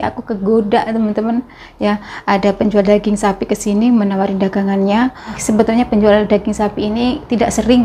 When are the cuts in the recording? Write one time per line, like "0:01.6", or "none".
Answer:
none